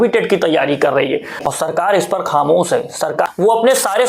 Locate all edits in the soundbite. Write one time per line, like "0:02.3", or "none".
0:01.4
0:03.3